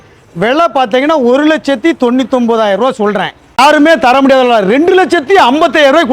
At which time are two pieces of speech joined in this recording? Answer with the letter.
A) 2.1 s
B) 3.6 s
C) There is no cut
B